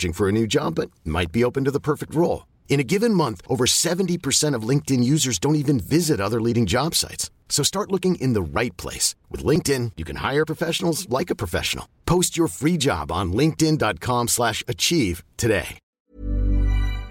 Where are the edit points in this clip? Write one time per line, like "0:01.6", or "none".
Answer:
0:16.0